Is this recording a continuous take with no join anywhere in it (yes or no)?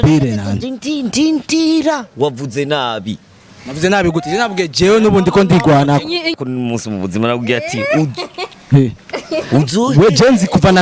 no